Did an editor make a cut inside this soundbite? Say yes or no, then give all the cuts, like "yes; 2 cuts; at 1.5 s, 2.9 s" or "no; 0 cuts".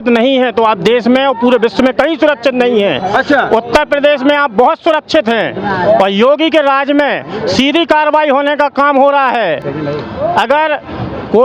no; 0 cuts